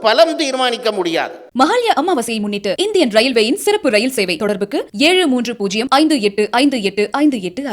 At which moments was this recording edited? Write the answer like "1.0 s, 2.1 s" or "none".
1.4 s